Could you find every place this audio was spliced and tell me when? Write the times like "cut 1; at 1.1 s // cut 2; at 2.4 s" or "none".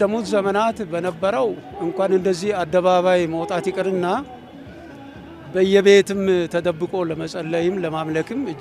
none